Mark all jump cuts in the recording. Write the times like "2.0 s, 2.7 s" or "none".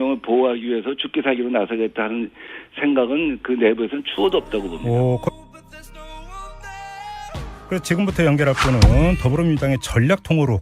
5.2 s